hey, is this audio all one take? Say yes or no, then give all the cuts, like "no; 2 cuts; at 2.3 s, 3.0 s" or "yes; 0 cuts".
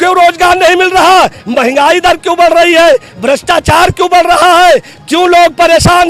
yes; 0 cuts